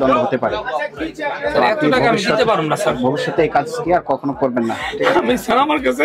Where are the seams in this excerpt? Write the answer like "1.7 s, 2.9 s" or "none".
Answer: none